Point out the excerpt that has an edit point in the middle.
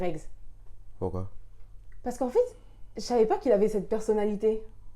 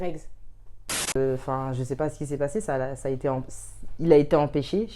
second; 1 cut; at 1.1 s

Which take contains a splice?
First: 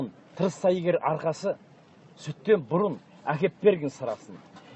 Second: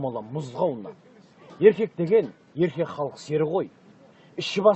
second; 1 cut; at 2.7 s

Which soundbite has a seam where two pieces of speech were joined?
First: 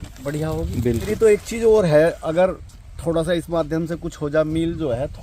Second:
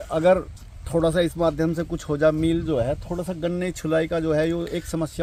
first; 1 cut; at 1.1 s

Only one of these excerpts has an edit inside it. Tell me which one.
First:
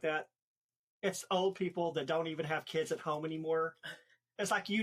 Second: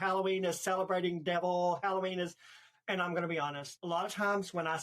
second; 1 cut; at 3.7 s

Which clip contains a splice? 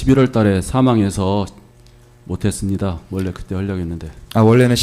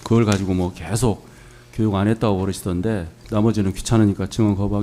second; 1 cut; at 3.2 s

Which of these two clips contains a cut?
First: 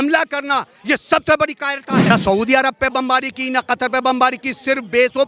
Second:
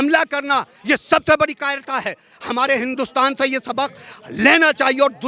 first; 1 cut; at 2.1 s

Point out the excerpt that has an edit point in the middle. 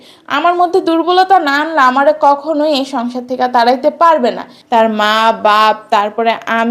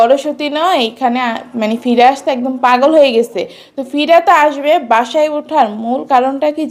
first; 1 cut; at 4.4 s

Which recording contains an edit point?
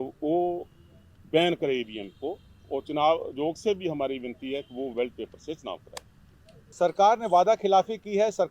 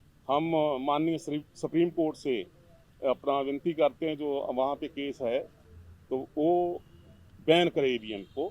first; 1 cut; at 6.7 s

